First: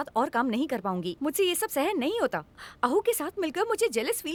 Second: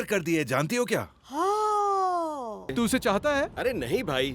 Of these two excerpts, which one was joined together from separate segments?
second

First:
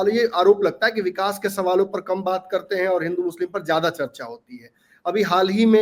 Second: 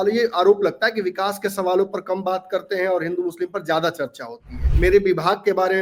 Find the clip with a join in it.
second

